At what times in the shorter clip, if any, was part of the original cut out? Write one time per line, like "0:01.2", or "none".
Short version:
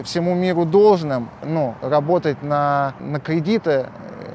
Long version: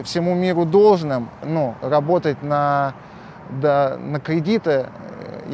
0:03.1